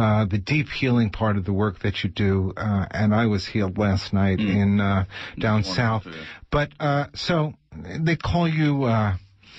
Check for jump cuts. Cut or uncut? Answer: uncut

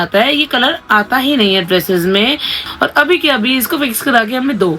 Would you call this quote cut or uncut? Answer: cut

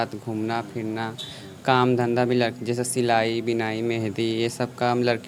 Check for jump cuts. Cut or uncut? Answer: uncut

